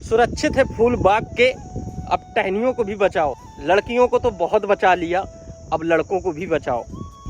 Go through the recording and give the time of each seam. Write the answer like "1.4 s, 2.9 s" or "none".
3.5 s